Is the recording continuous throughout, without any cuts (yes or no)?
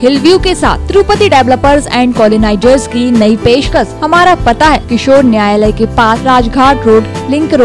no